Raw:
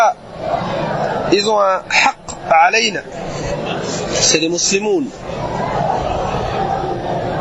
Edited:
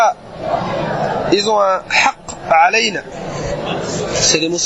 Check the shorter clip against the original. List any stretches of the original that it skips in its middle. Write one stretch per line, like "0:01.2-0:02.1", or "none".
none

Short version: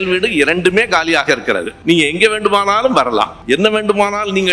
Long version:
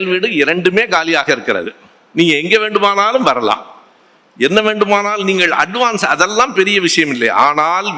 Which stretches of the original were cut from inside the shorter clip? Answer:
0:01.7-0:02.0
0:03.7-0:04.3

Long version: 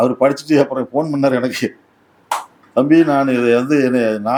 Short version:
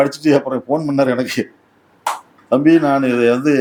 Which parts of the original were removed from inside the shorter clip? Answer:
none

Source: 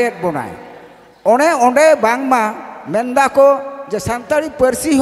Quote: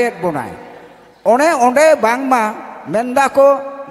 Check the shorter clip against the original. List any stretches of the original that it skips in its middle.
none

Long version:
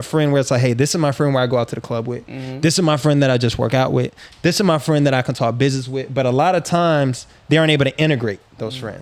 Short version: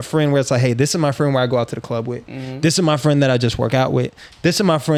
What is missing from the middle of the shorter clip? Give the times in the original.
none

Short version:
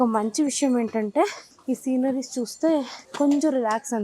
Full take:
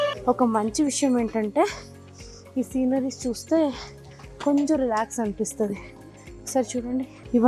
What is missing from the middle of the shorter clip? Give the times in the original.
0:01.9-0:02.4
0:03.9-0:04.3

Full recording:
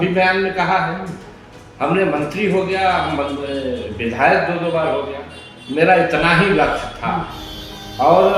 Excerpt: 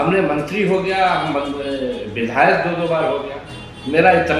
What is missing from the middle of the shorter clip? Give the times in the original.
none

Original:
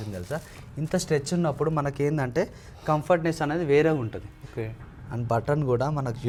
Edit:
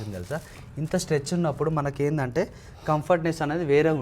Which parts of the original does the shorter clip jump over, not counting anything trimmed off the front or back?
none

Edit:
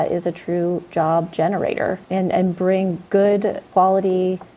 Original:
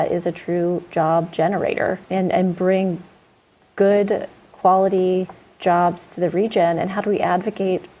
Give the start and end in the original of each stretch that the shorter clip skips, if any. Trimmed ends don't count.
0:03.0-0:03.7
0:04.3-0:04.5

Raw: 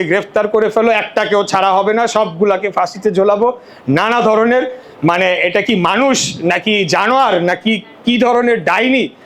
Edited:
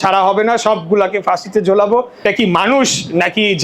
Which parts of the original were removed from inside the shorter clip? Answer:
0:03.7-0:05.5

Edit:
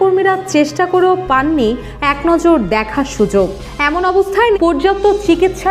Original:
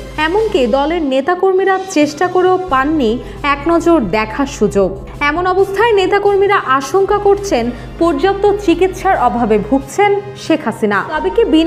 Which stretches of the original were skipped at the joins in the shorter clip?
0:06.0-0:08.0

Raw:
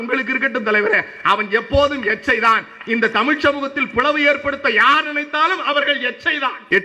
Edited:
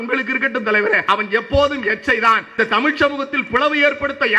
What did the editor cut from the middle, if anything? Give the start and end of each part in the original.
0:01.0-0:01.2
0:02.8-0:03.0

